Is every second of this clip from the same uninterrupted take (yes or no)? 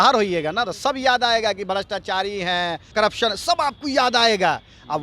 no